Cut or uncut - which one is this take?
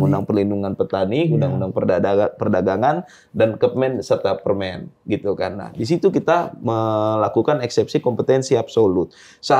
uncut